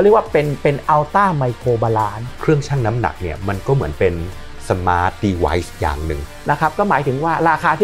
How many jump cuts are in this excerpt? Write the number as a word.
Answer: two